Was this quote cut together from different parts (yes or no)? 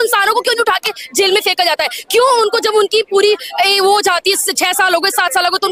no